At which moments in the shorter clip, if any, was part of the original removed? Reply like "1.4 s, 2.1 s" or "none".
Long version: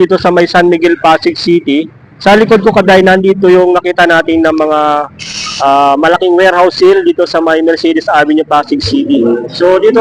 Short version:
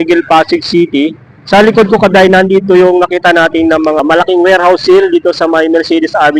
4.0 s